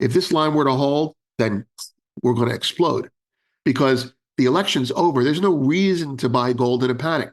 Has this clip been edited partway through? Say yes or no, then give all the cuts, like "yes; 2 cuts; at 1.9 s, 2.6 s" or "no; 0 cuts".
no; 0 cuts